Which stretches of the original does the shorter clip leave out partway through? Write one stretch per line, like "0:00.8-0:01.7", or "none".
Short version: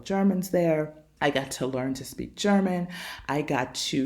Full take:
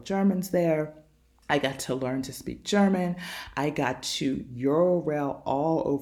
0:01.0-0:01.3